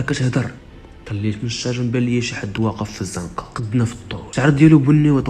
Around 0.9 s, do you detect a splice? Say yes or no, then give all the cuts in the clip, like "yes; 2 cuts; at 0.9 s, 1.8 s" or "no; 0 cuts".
no; 2 cuts; at 3.5 s, 4.3 s